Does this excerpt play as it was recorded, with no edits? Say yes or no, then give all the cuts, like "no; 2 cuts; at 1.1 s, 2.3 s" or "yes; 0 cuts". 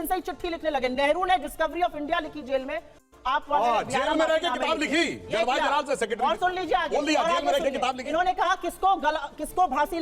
yes; 0 cuts